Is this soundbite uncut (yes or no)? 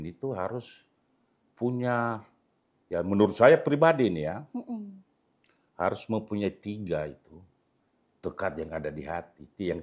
yes